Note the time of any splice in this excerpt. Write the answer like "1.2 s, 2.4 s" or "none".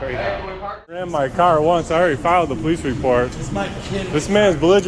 1.1 s

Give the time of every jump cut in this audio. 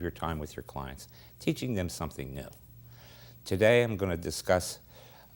none

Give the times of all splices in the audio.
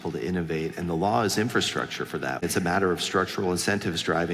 2.4 s

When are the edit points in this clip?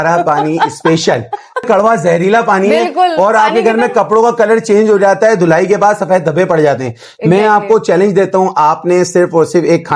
1.6 s

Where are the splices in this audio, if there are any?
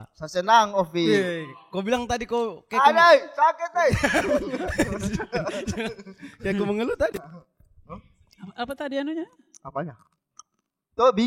none

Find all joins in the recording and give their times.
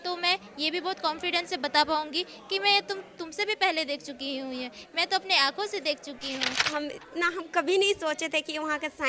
6.6 s

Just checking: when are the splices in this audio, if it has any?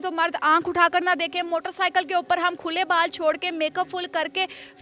none

